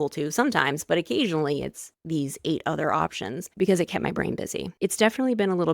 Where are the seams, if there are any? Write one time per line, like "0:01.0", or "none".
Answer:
0:03.5
0:04.7